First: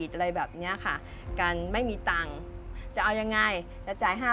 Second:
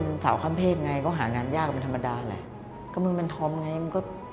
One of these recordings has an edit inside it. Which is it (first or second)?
first